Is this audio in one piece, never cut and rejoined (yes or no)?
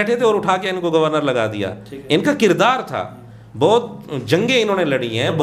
yes